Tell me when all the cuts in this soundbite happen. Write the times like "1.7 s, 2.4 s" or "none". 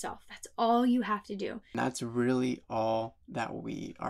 1.8 s